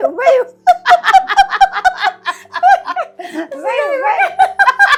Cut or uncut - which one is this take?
uncut